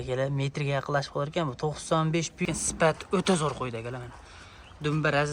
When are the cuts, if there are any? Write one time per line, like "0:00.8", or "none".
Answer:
0:02.4